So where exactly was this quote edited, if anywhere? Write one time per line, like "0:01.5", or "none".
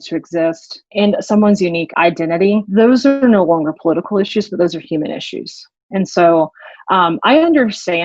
0:00.9
0:02.1